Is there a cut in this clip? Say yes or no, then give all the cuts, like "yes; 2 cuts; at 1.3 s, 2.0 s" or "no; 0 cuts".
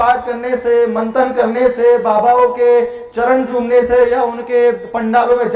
no; 0 cuts